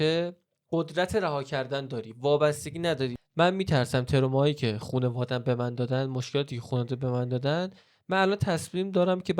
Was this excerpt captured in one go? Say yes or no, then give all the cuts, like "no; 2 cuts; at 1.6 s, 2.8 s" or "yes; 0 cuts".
no; 1 cut; at 3.2 s